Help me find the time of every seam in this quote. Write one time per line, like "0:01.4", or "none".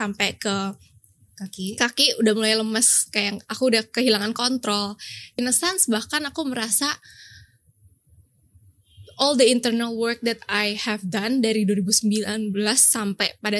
0:05.3